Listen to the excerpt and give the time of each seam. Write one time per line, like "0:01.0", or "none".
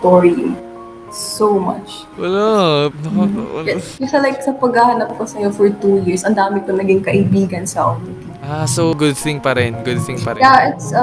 0:02.0